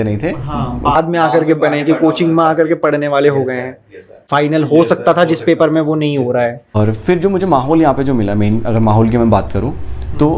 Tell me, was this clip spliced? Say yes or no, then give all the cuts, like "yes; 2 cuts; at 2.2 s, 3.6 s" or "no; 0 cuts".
yes; 2 cuts; at 4.2 s, 6.8 s